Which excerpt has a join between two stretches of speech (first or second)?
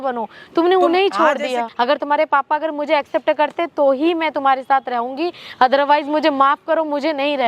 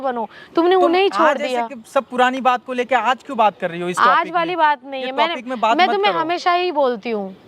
first